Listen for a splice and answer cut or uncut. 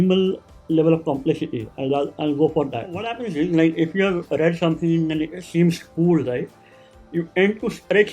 cut